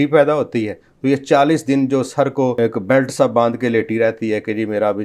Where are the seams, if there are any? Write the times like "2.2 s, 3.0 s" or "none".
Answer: 2.5 s